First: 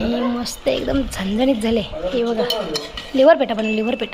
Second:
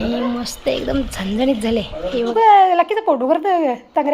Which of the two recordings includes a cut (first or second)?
second